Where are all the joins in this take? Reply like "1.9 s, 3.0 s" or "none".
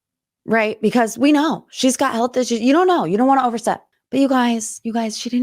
3.9 s